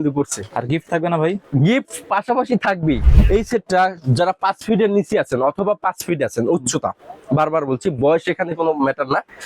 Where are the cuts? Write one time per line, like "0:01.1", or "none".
0:03.1